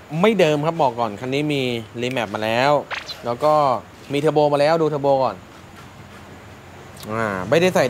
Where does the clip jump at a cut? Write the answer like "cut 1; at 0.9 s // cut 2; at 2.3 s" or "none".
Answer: none